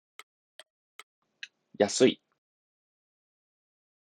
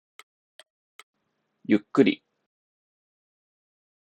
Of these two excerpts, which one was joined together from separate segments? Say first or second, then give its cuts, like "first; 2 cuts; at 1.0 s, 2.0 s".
second; 1 cut; at 1.1 s